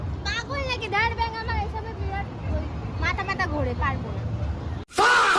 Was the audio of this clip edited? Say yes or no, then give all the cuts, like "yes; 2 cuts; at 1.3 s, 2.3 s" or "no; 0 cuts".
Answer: no; 0 cuts